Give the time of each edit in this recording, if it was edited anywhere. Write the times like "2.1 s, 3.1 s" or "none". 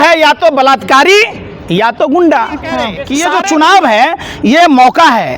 3.0 s